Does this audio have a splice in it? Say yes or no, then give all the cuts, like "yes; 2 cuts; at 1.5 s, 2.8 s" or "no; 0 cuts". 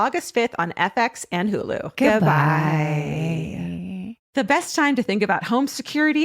yes; 1 cut; at 4.2 s